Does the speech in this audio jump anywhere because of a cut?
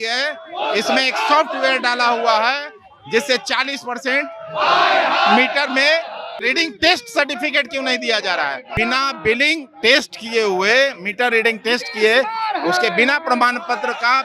yes; 2 cuts; at 6.4 s, 8.6 s

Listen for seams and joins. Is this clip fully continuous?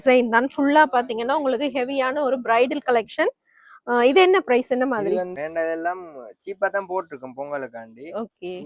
no; 1 cut; at 5.3 s

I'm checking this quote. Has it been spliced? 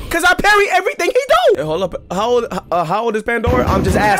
yes; 1 cut; at 1.6 s

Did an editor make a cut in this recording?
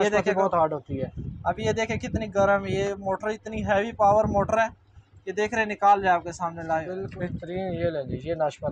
yes; 1 cut; at 7.0 s

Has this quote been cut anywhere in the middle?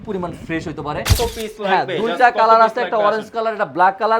yes; 1 cut; at 1.1 s

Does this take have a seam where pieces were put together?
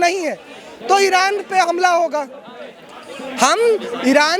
no; 0 cuts

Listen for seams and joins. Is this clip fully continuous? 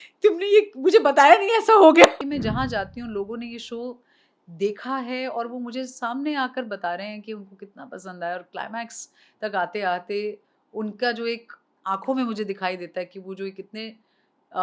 no; 1 cut; at 2.2 s

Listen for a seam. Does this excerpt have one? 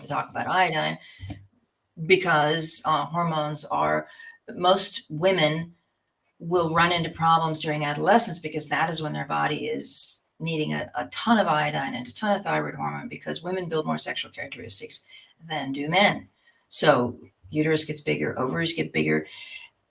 no; 0 cuts

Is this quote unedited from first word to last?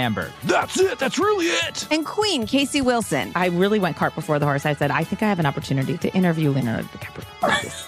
yes; 0 cuts

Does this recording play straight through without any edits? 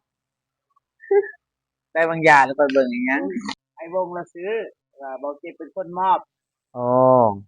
no; 1 cut; at 3.6 s

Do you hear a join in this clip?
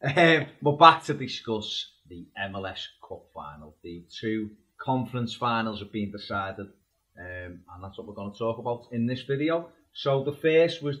no; 0 cuts

